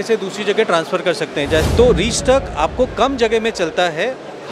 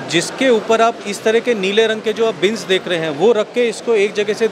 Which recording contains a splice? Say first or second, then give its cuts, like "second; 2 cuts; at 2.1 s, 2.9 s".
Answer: first; 1 cut; at 1.7 s